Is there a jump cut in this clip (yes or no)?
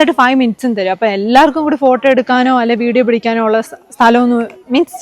no